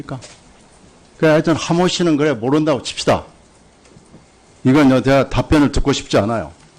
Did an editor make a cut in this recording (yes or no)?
yes